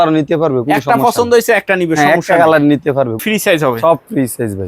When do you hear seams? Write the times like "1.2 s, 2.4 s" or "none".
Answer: 3.2 s